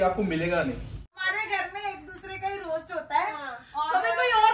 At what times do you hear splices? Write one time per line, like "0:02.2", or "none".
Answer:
0:01.1